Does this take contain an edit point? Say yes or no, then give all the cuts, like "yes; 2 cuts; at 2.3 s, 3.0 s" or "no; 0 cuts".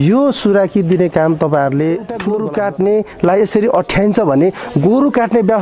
yes; 1 cut; at 2.2 s